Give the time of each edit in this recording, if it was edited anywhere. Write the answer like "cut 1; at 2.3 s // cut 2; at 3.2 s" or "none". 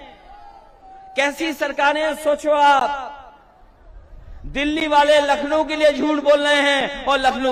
none